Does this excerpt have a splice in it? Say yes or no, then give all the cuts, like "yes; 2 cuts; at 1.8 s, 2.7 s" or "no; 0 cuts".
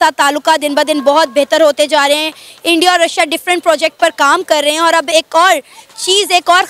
no; 0 cuts